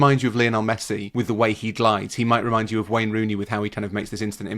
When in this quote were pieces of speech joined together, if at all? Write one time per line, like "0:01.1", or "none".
0:01.1